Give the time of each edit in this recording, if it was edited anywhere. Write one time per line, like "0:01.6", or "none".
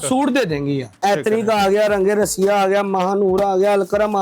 0:01.0